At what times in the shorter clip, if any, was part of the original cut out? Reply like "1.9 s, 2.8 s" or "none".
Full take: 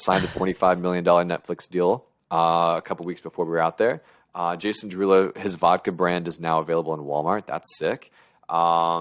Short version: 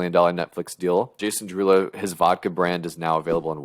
1.2 s